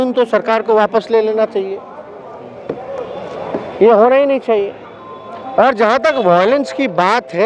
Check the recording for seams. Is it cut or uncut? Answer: uncut